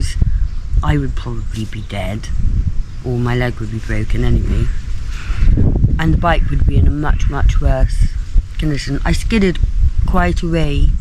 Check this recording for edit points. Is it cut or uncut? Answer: uncut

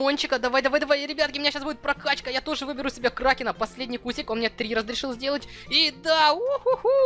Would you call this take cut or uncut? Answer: uncut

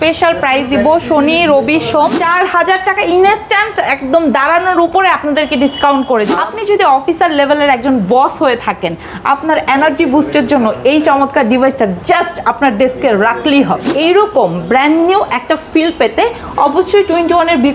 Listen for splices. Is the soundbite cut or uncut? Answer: cut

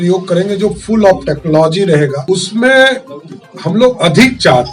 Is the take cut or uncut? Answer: cut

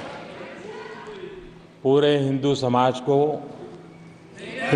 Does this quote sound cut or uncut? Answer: uncut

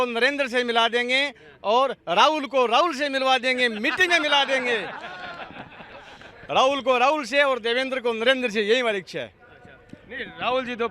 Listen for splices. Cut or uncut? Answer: uncut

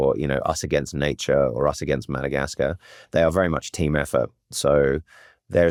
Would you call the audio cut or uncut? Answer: uncut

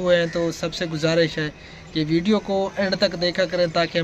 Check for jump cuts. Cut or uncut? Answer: uncut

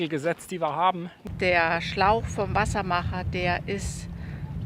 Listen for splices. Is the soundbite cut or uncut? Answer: cut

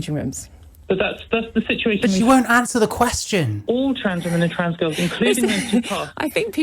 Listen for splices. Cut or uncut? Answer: cut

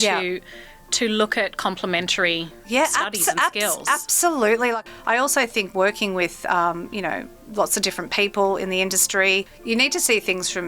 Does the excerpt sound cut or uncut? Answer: cut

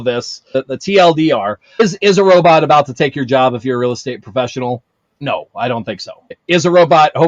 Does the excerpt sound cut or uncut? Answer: uncut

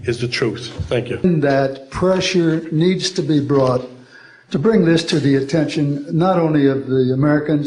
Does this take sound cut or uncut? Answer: cut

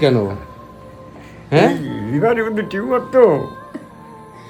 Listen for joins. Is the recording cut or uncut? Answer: uncut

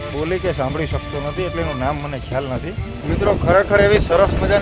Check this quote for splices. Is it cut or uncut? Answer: cut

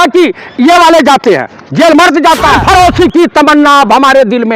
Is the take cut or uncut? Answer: cut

